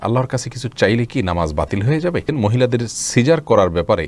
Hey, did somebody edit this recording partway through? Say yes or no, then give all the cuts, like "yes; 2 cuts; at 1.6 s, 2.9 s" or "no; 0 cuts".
yes; 1 cut; at 2.3 s